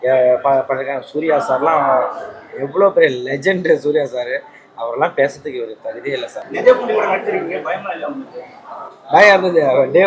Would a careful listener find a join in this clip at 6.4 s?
yes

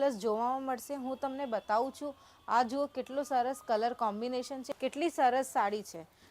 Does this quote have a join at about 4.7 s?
yes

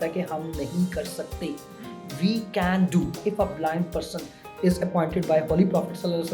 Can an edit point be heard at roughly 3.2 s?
yes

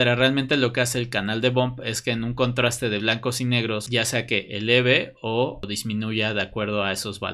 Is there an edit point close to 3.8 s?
yes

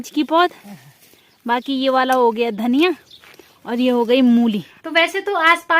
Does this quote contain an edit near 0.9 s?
no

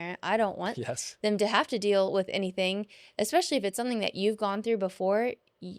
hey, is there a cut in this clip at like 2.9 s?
no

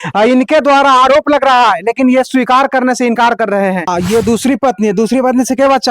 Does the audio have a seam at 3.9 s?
yes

